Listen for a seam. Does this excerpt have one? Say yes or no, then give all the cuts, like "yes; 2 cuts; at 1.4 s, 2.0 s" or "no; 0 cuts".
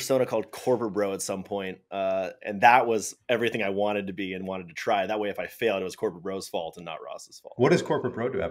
no; 0 cuts